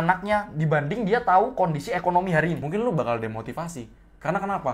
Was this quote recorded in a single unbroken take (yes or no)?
no